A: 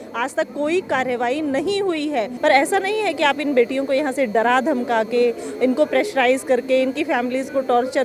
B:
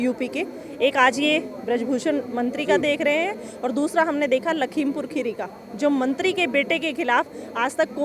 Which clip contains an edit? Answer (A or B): A